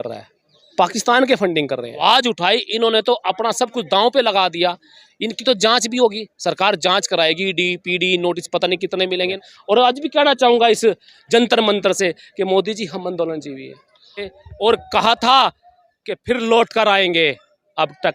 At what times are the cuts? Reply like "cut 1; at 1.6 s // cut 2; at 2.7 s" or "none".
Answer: cut 1; at 2.0 s // cut 2; at 9.5 s // cut 3; at 14.2 s